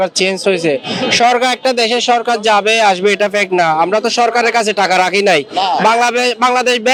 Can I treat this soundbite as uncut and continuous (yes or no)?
yes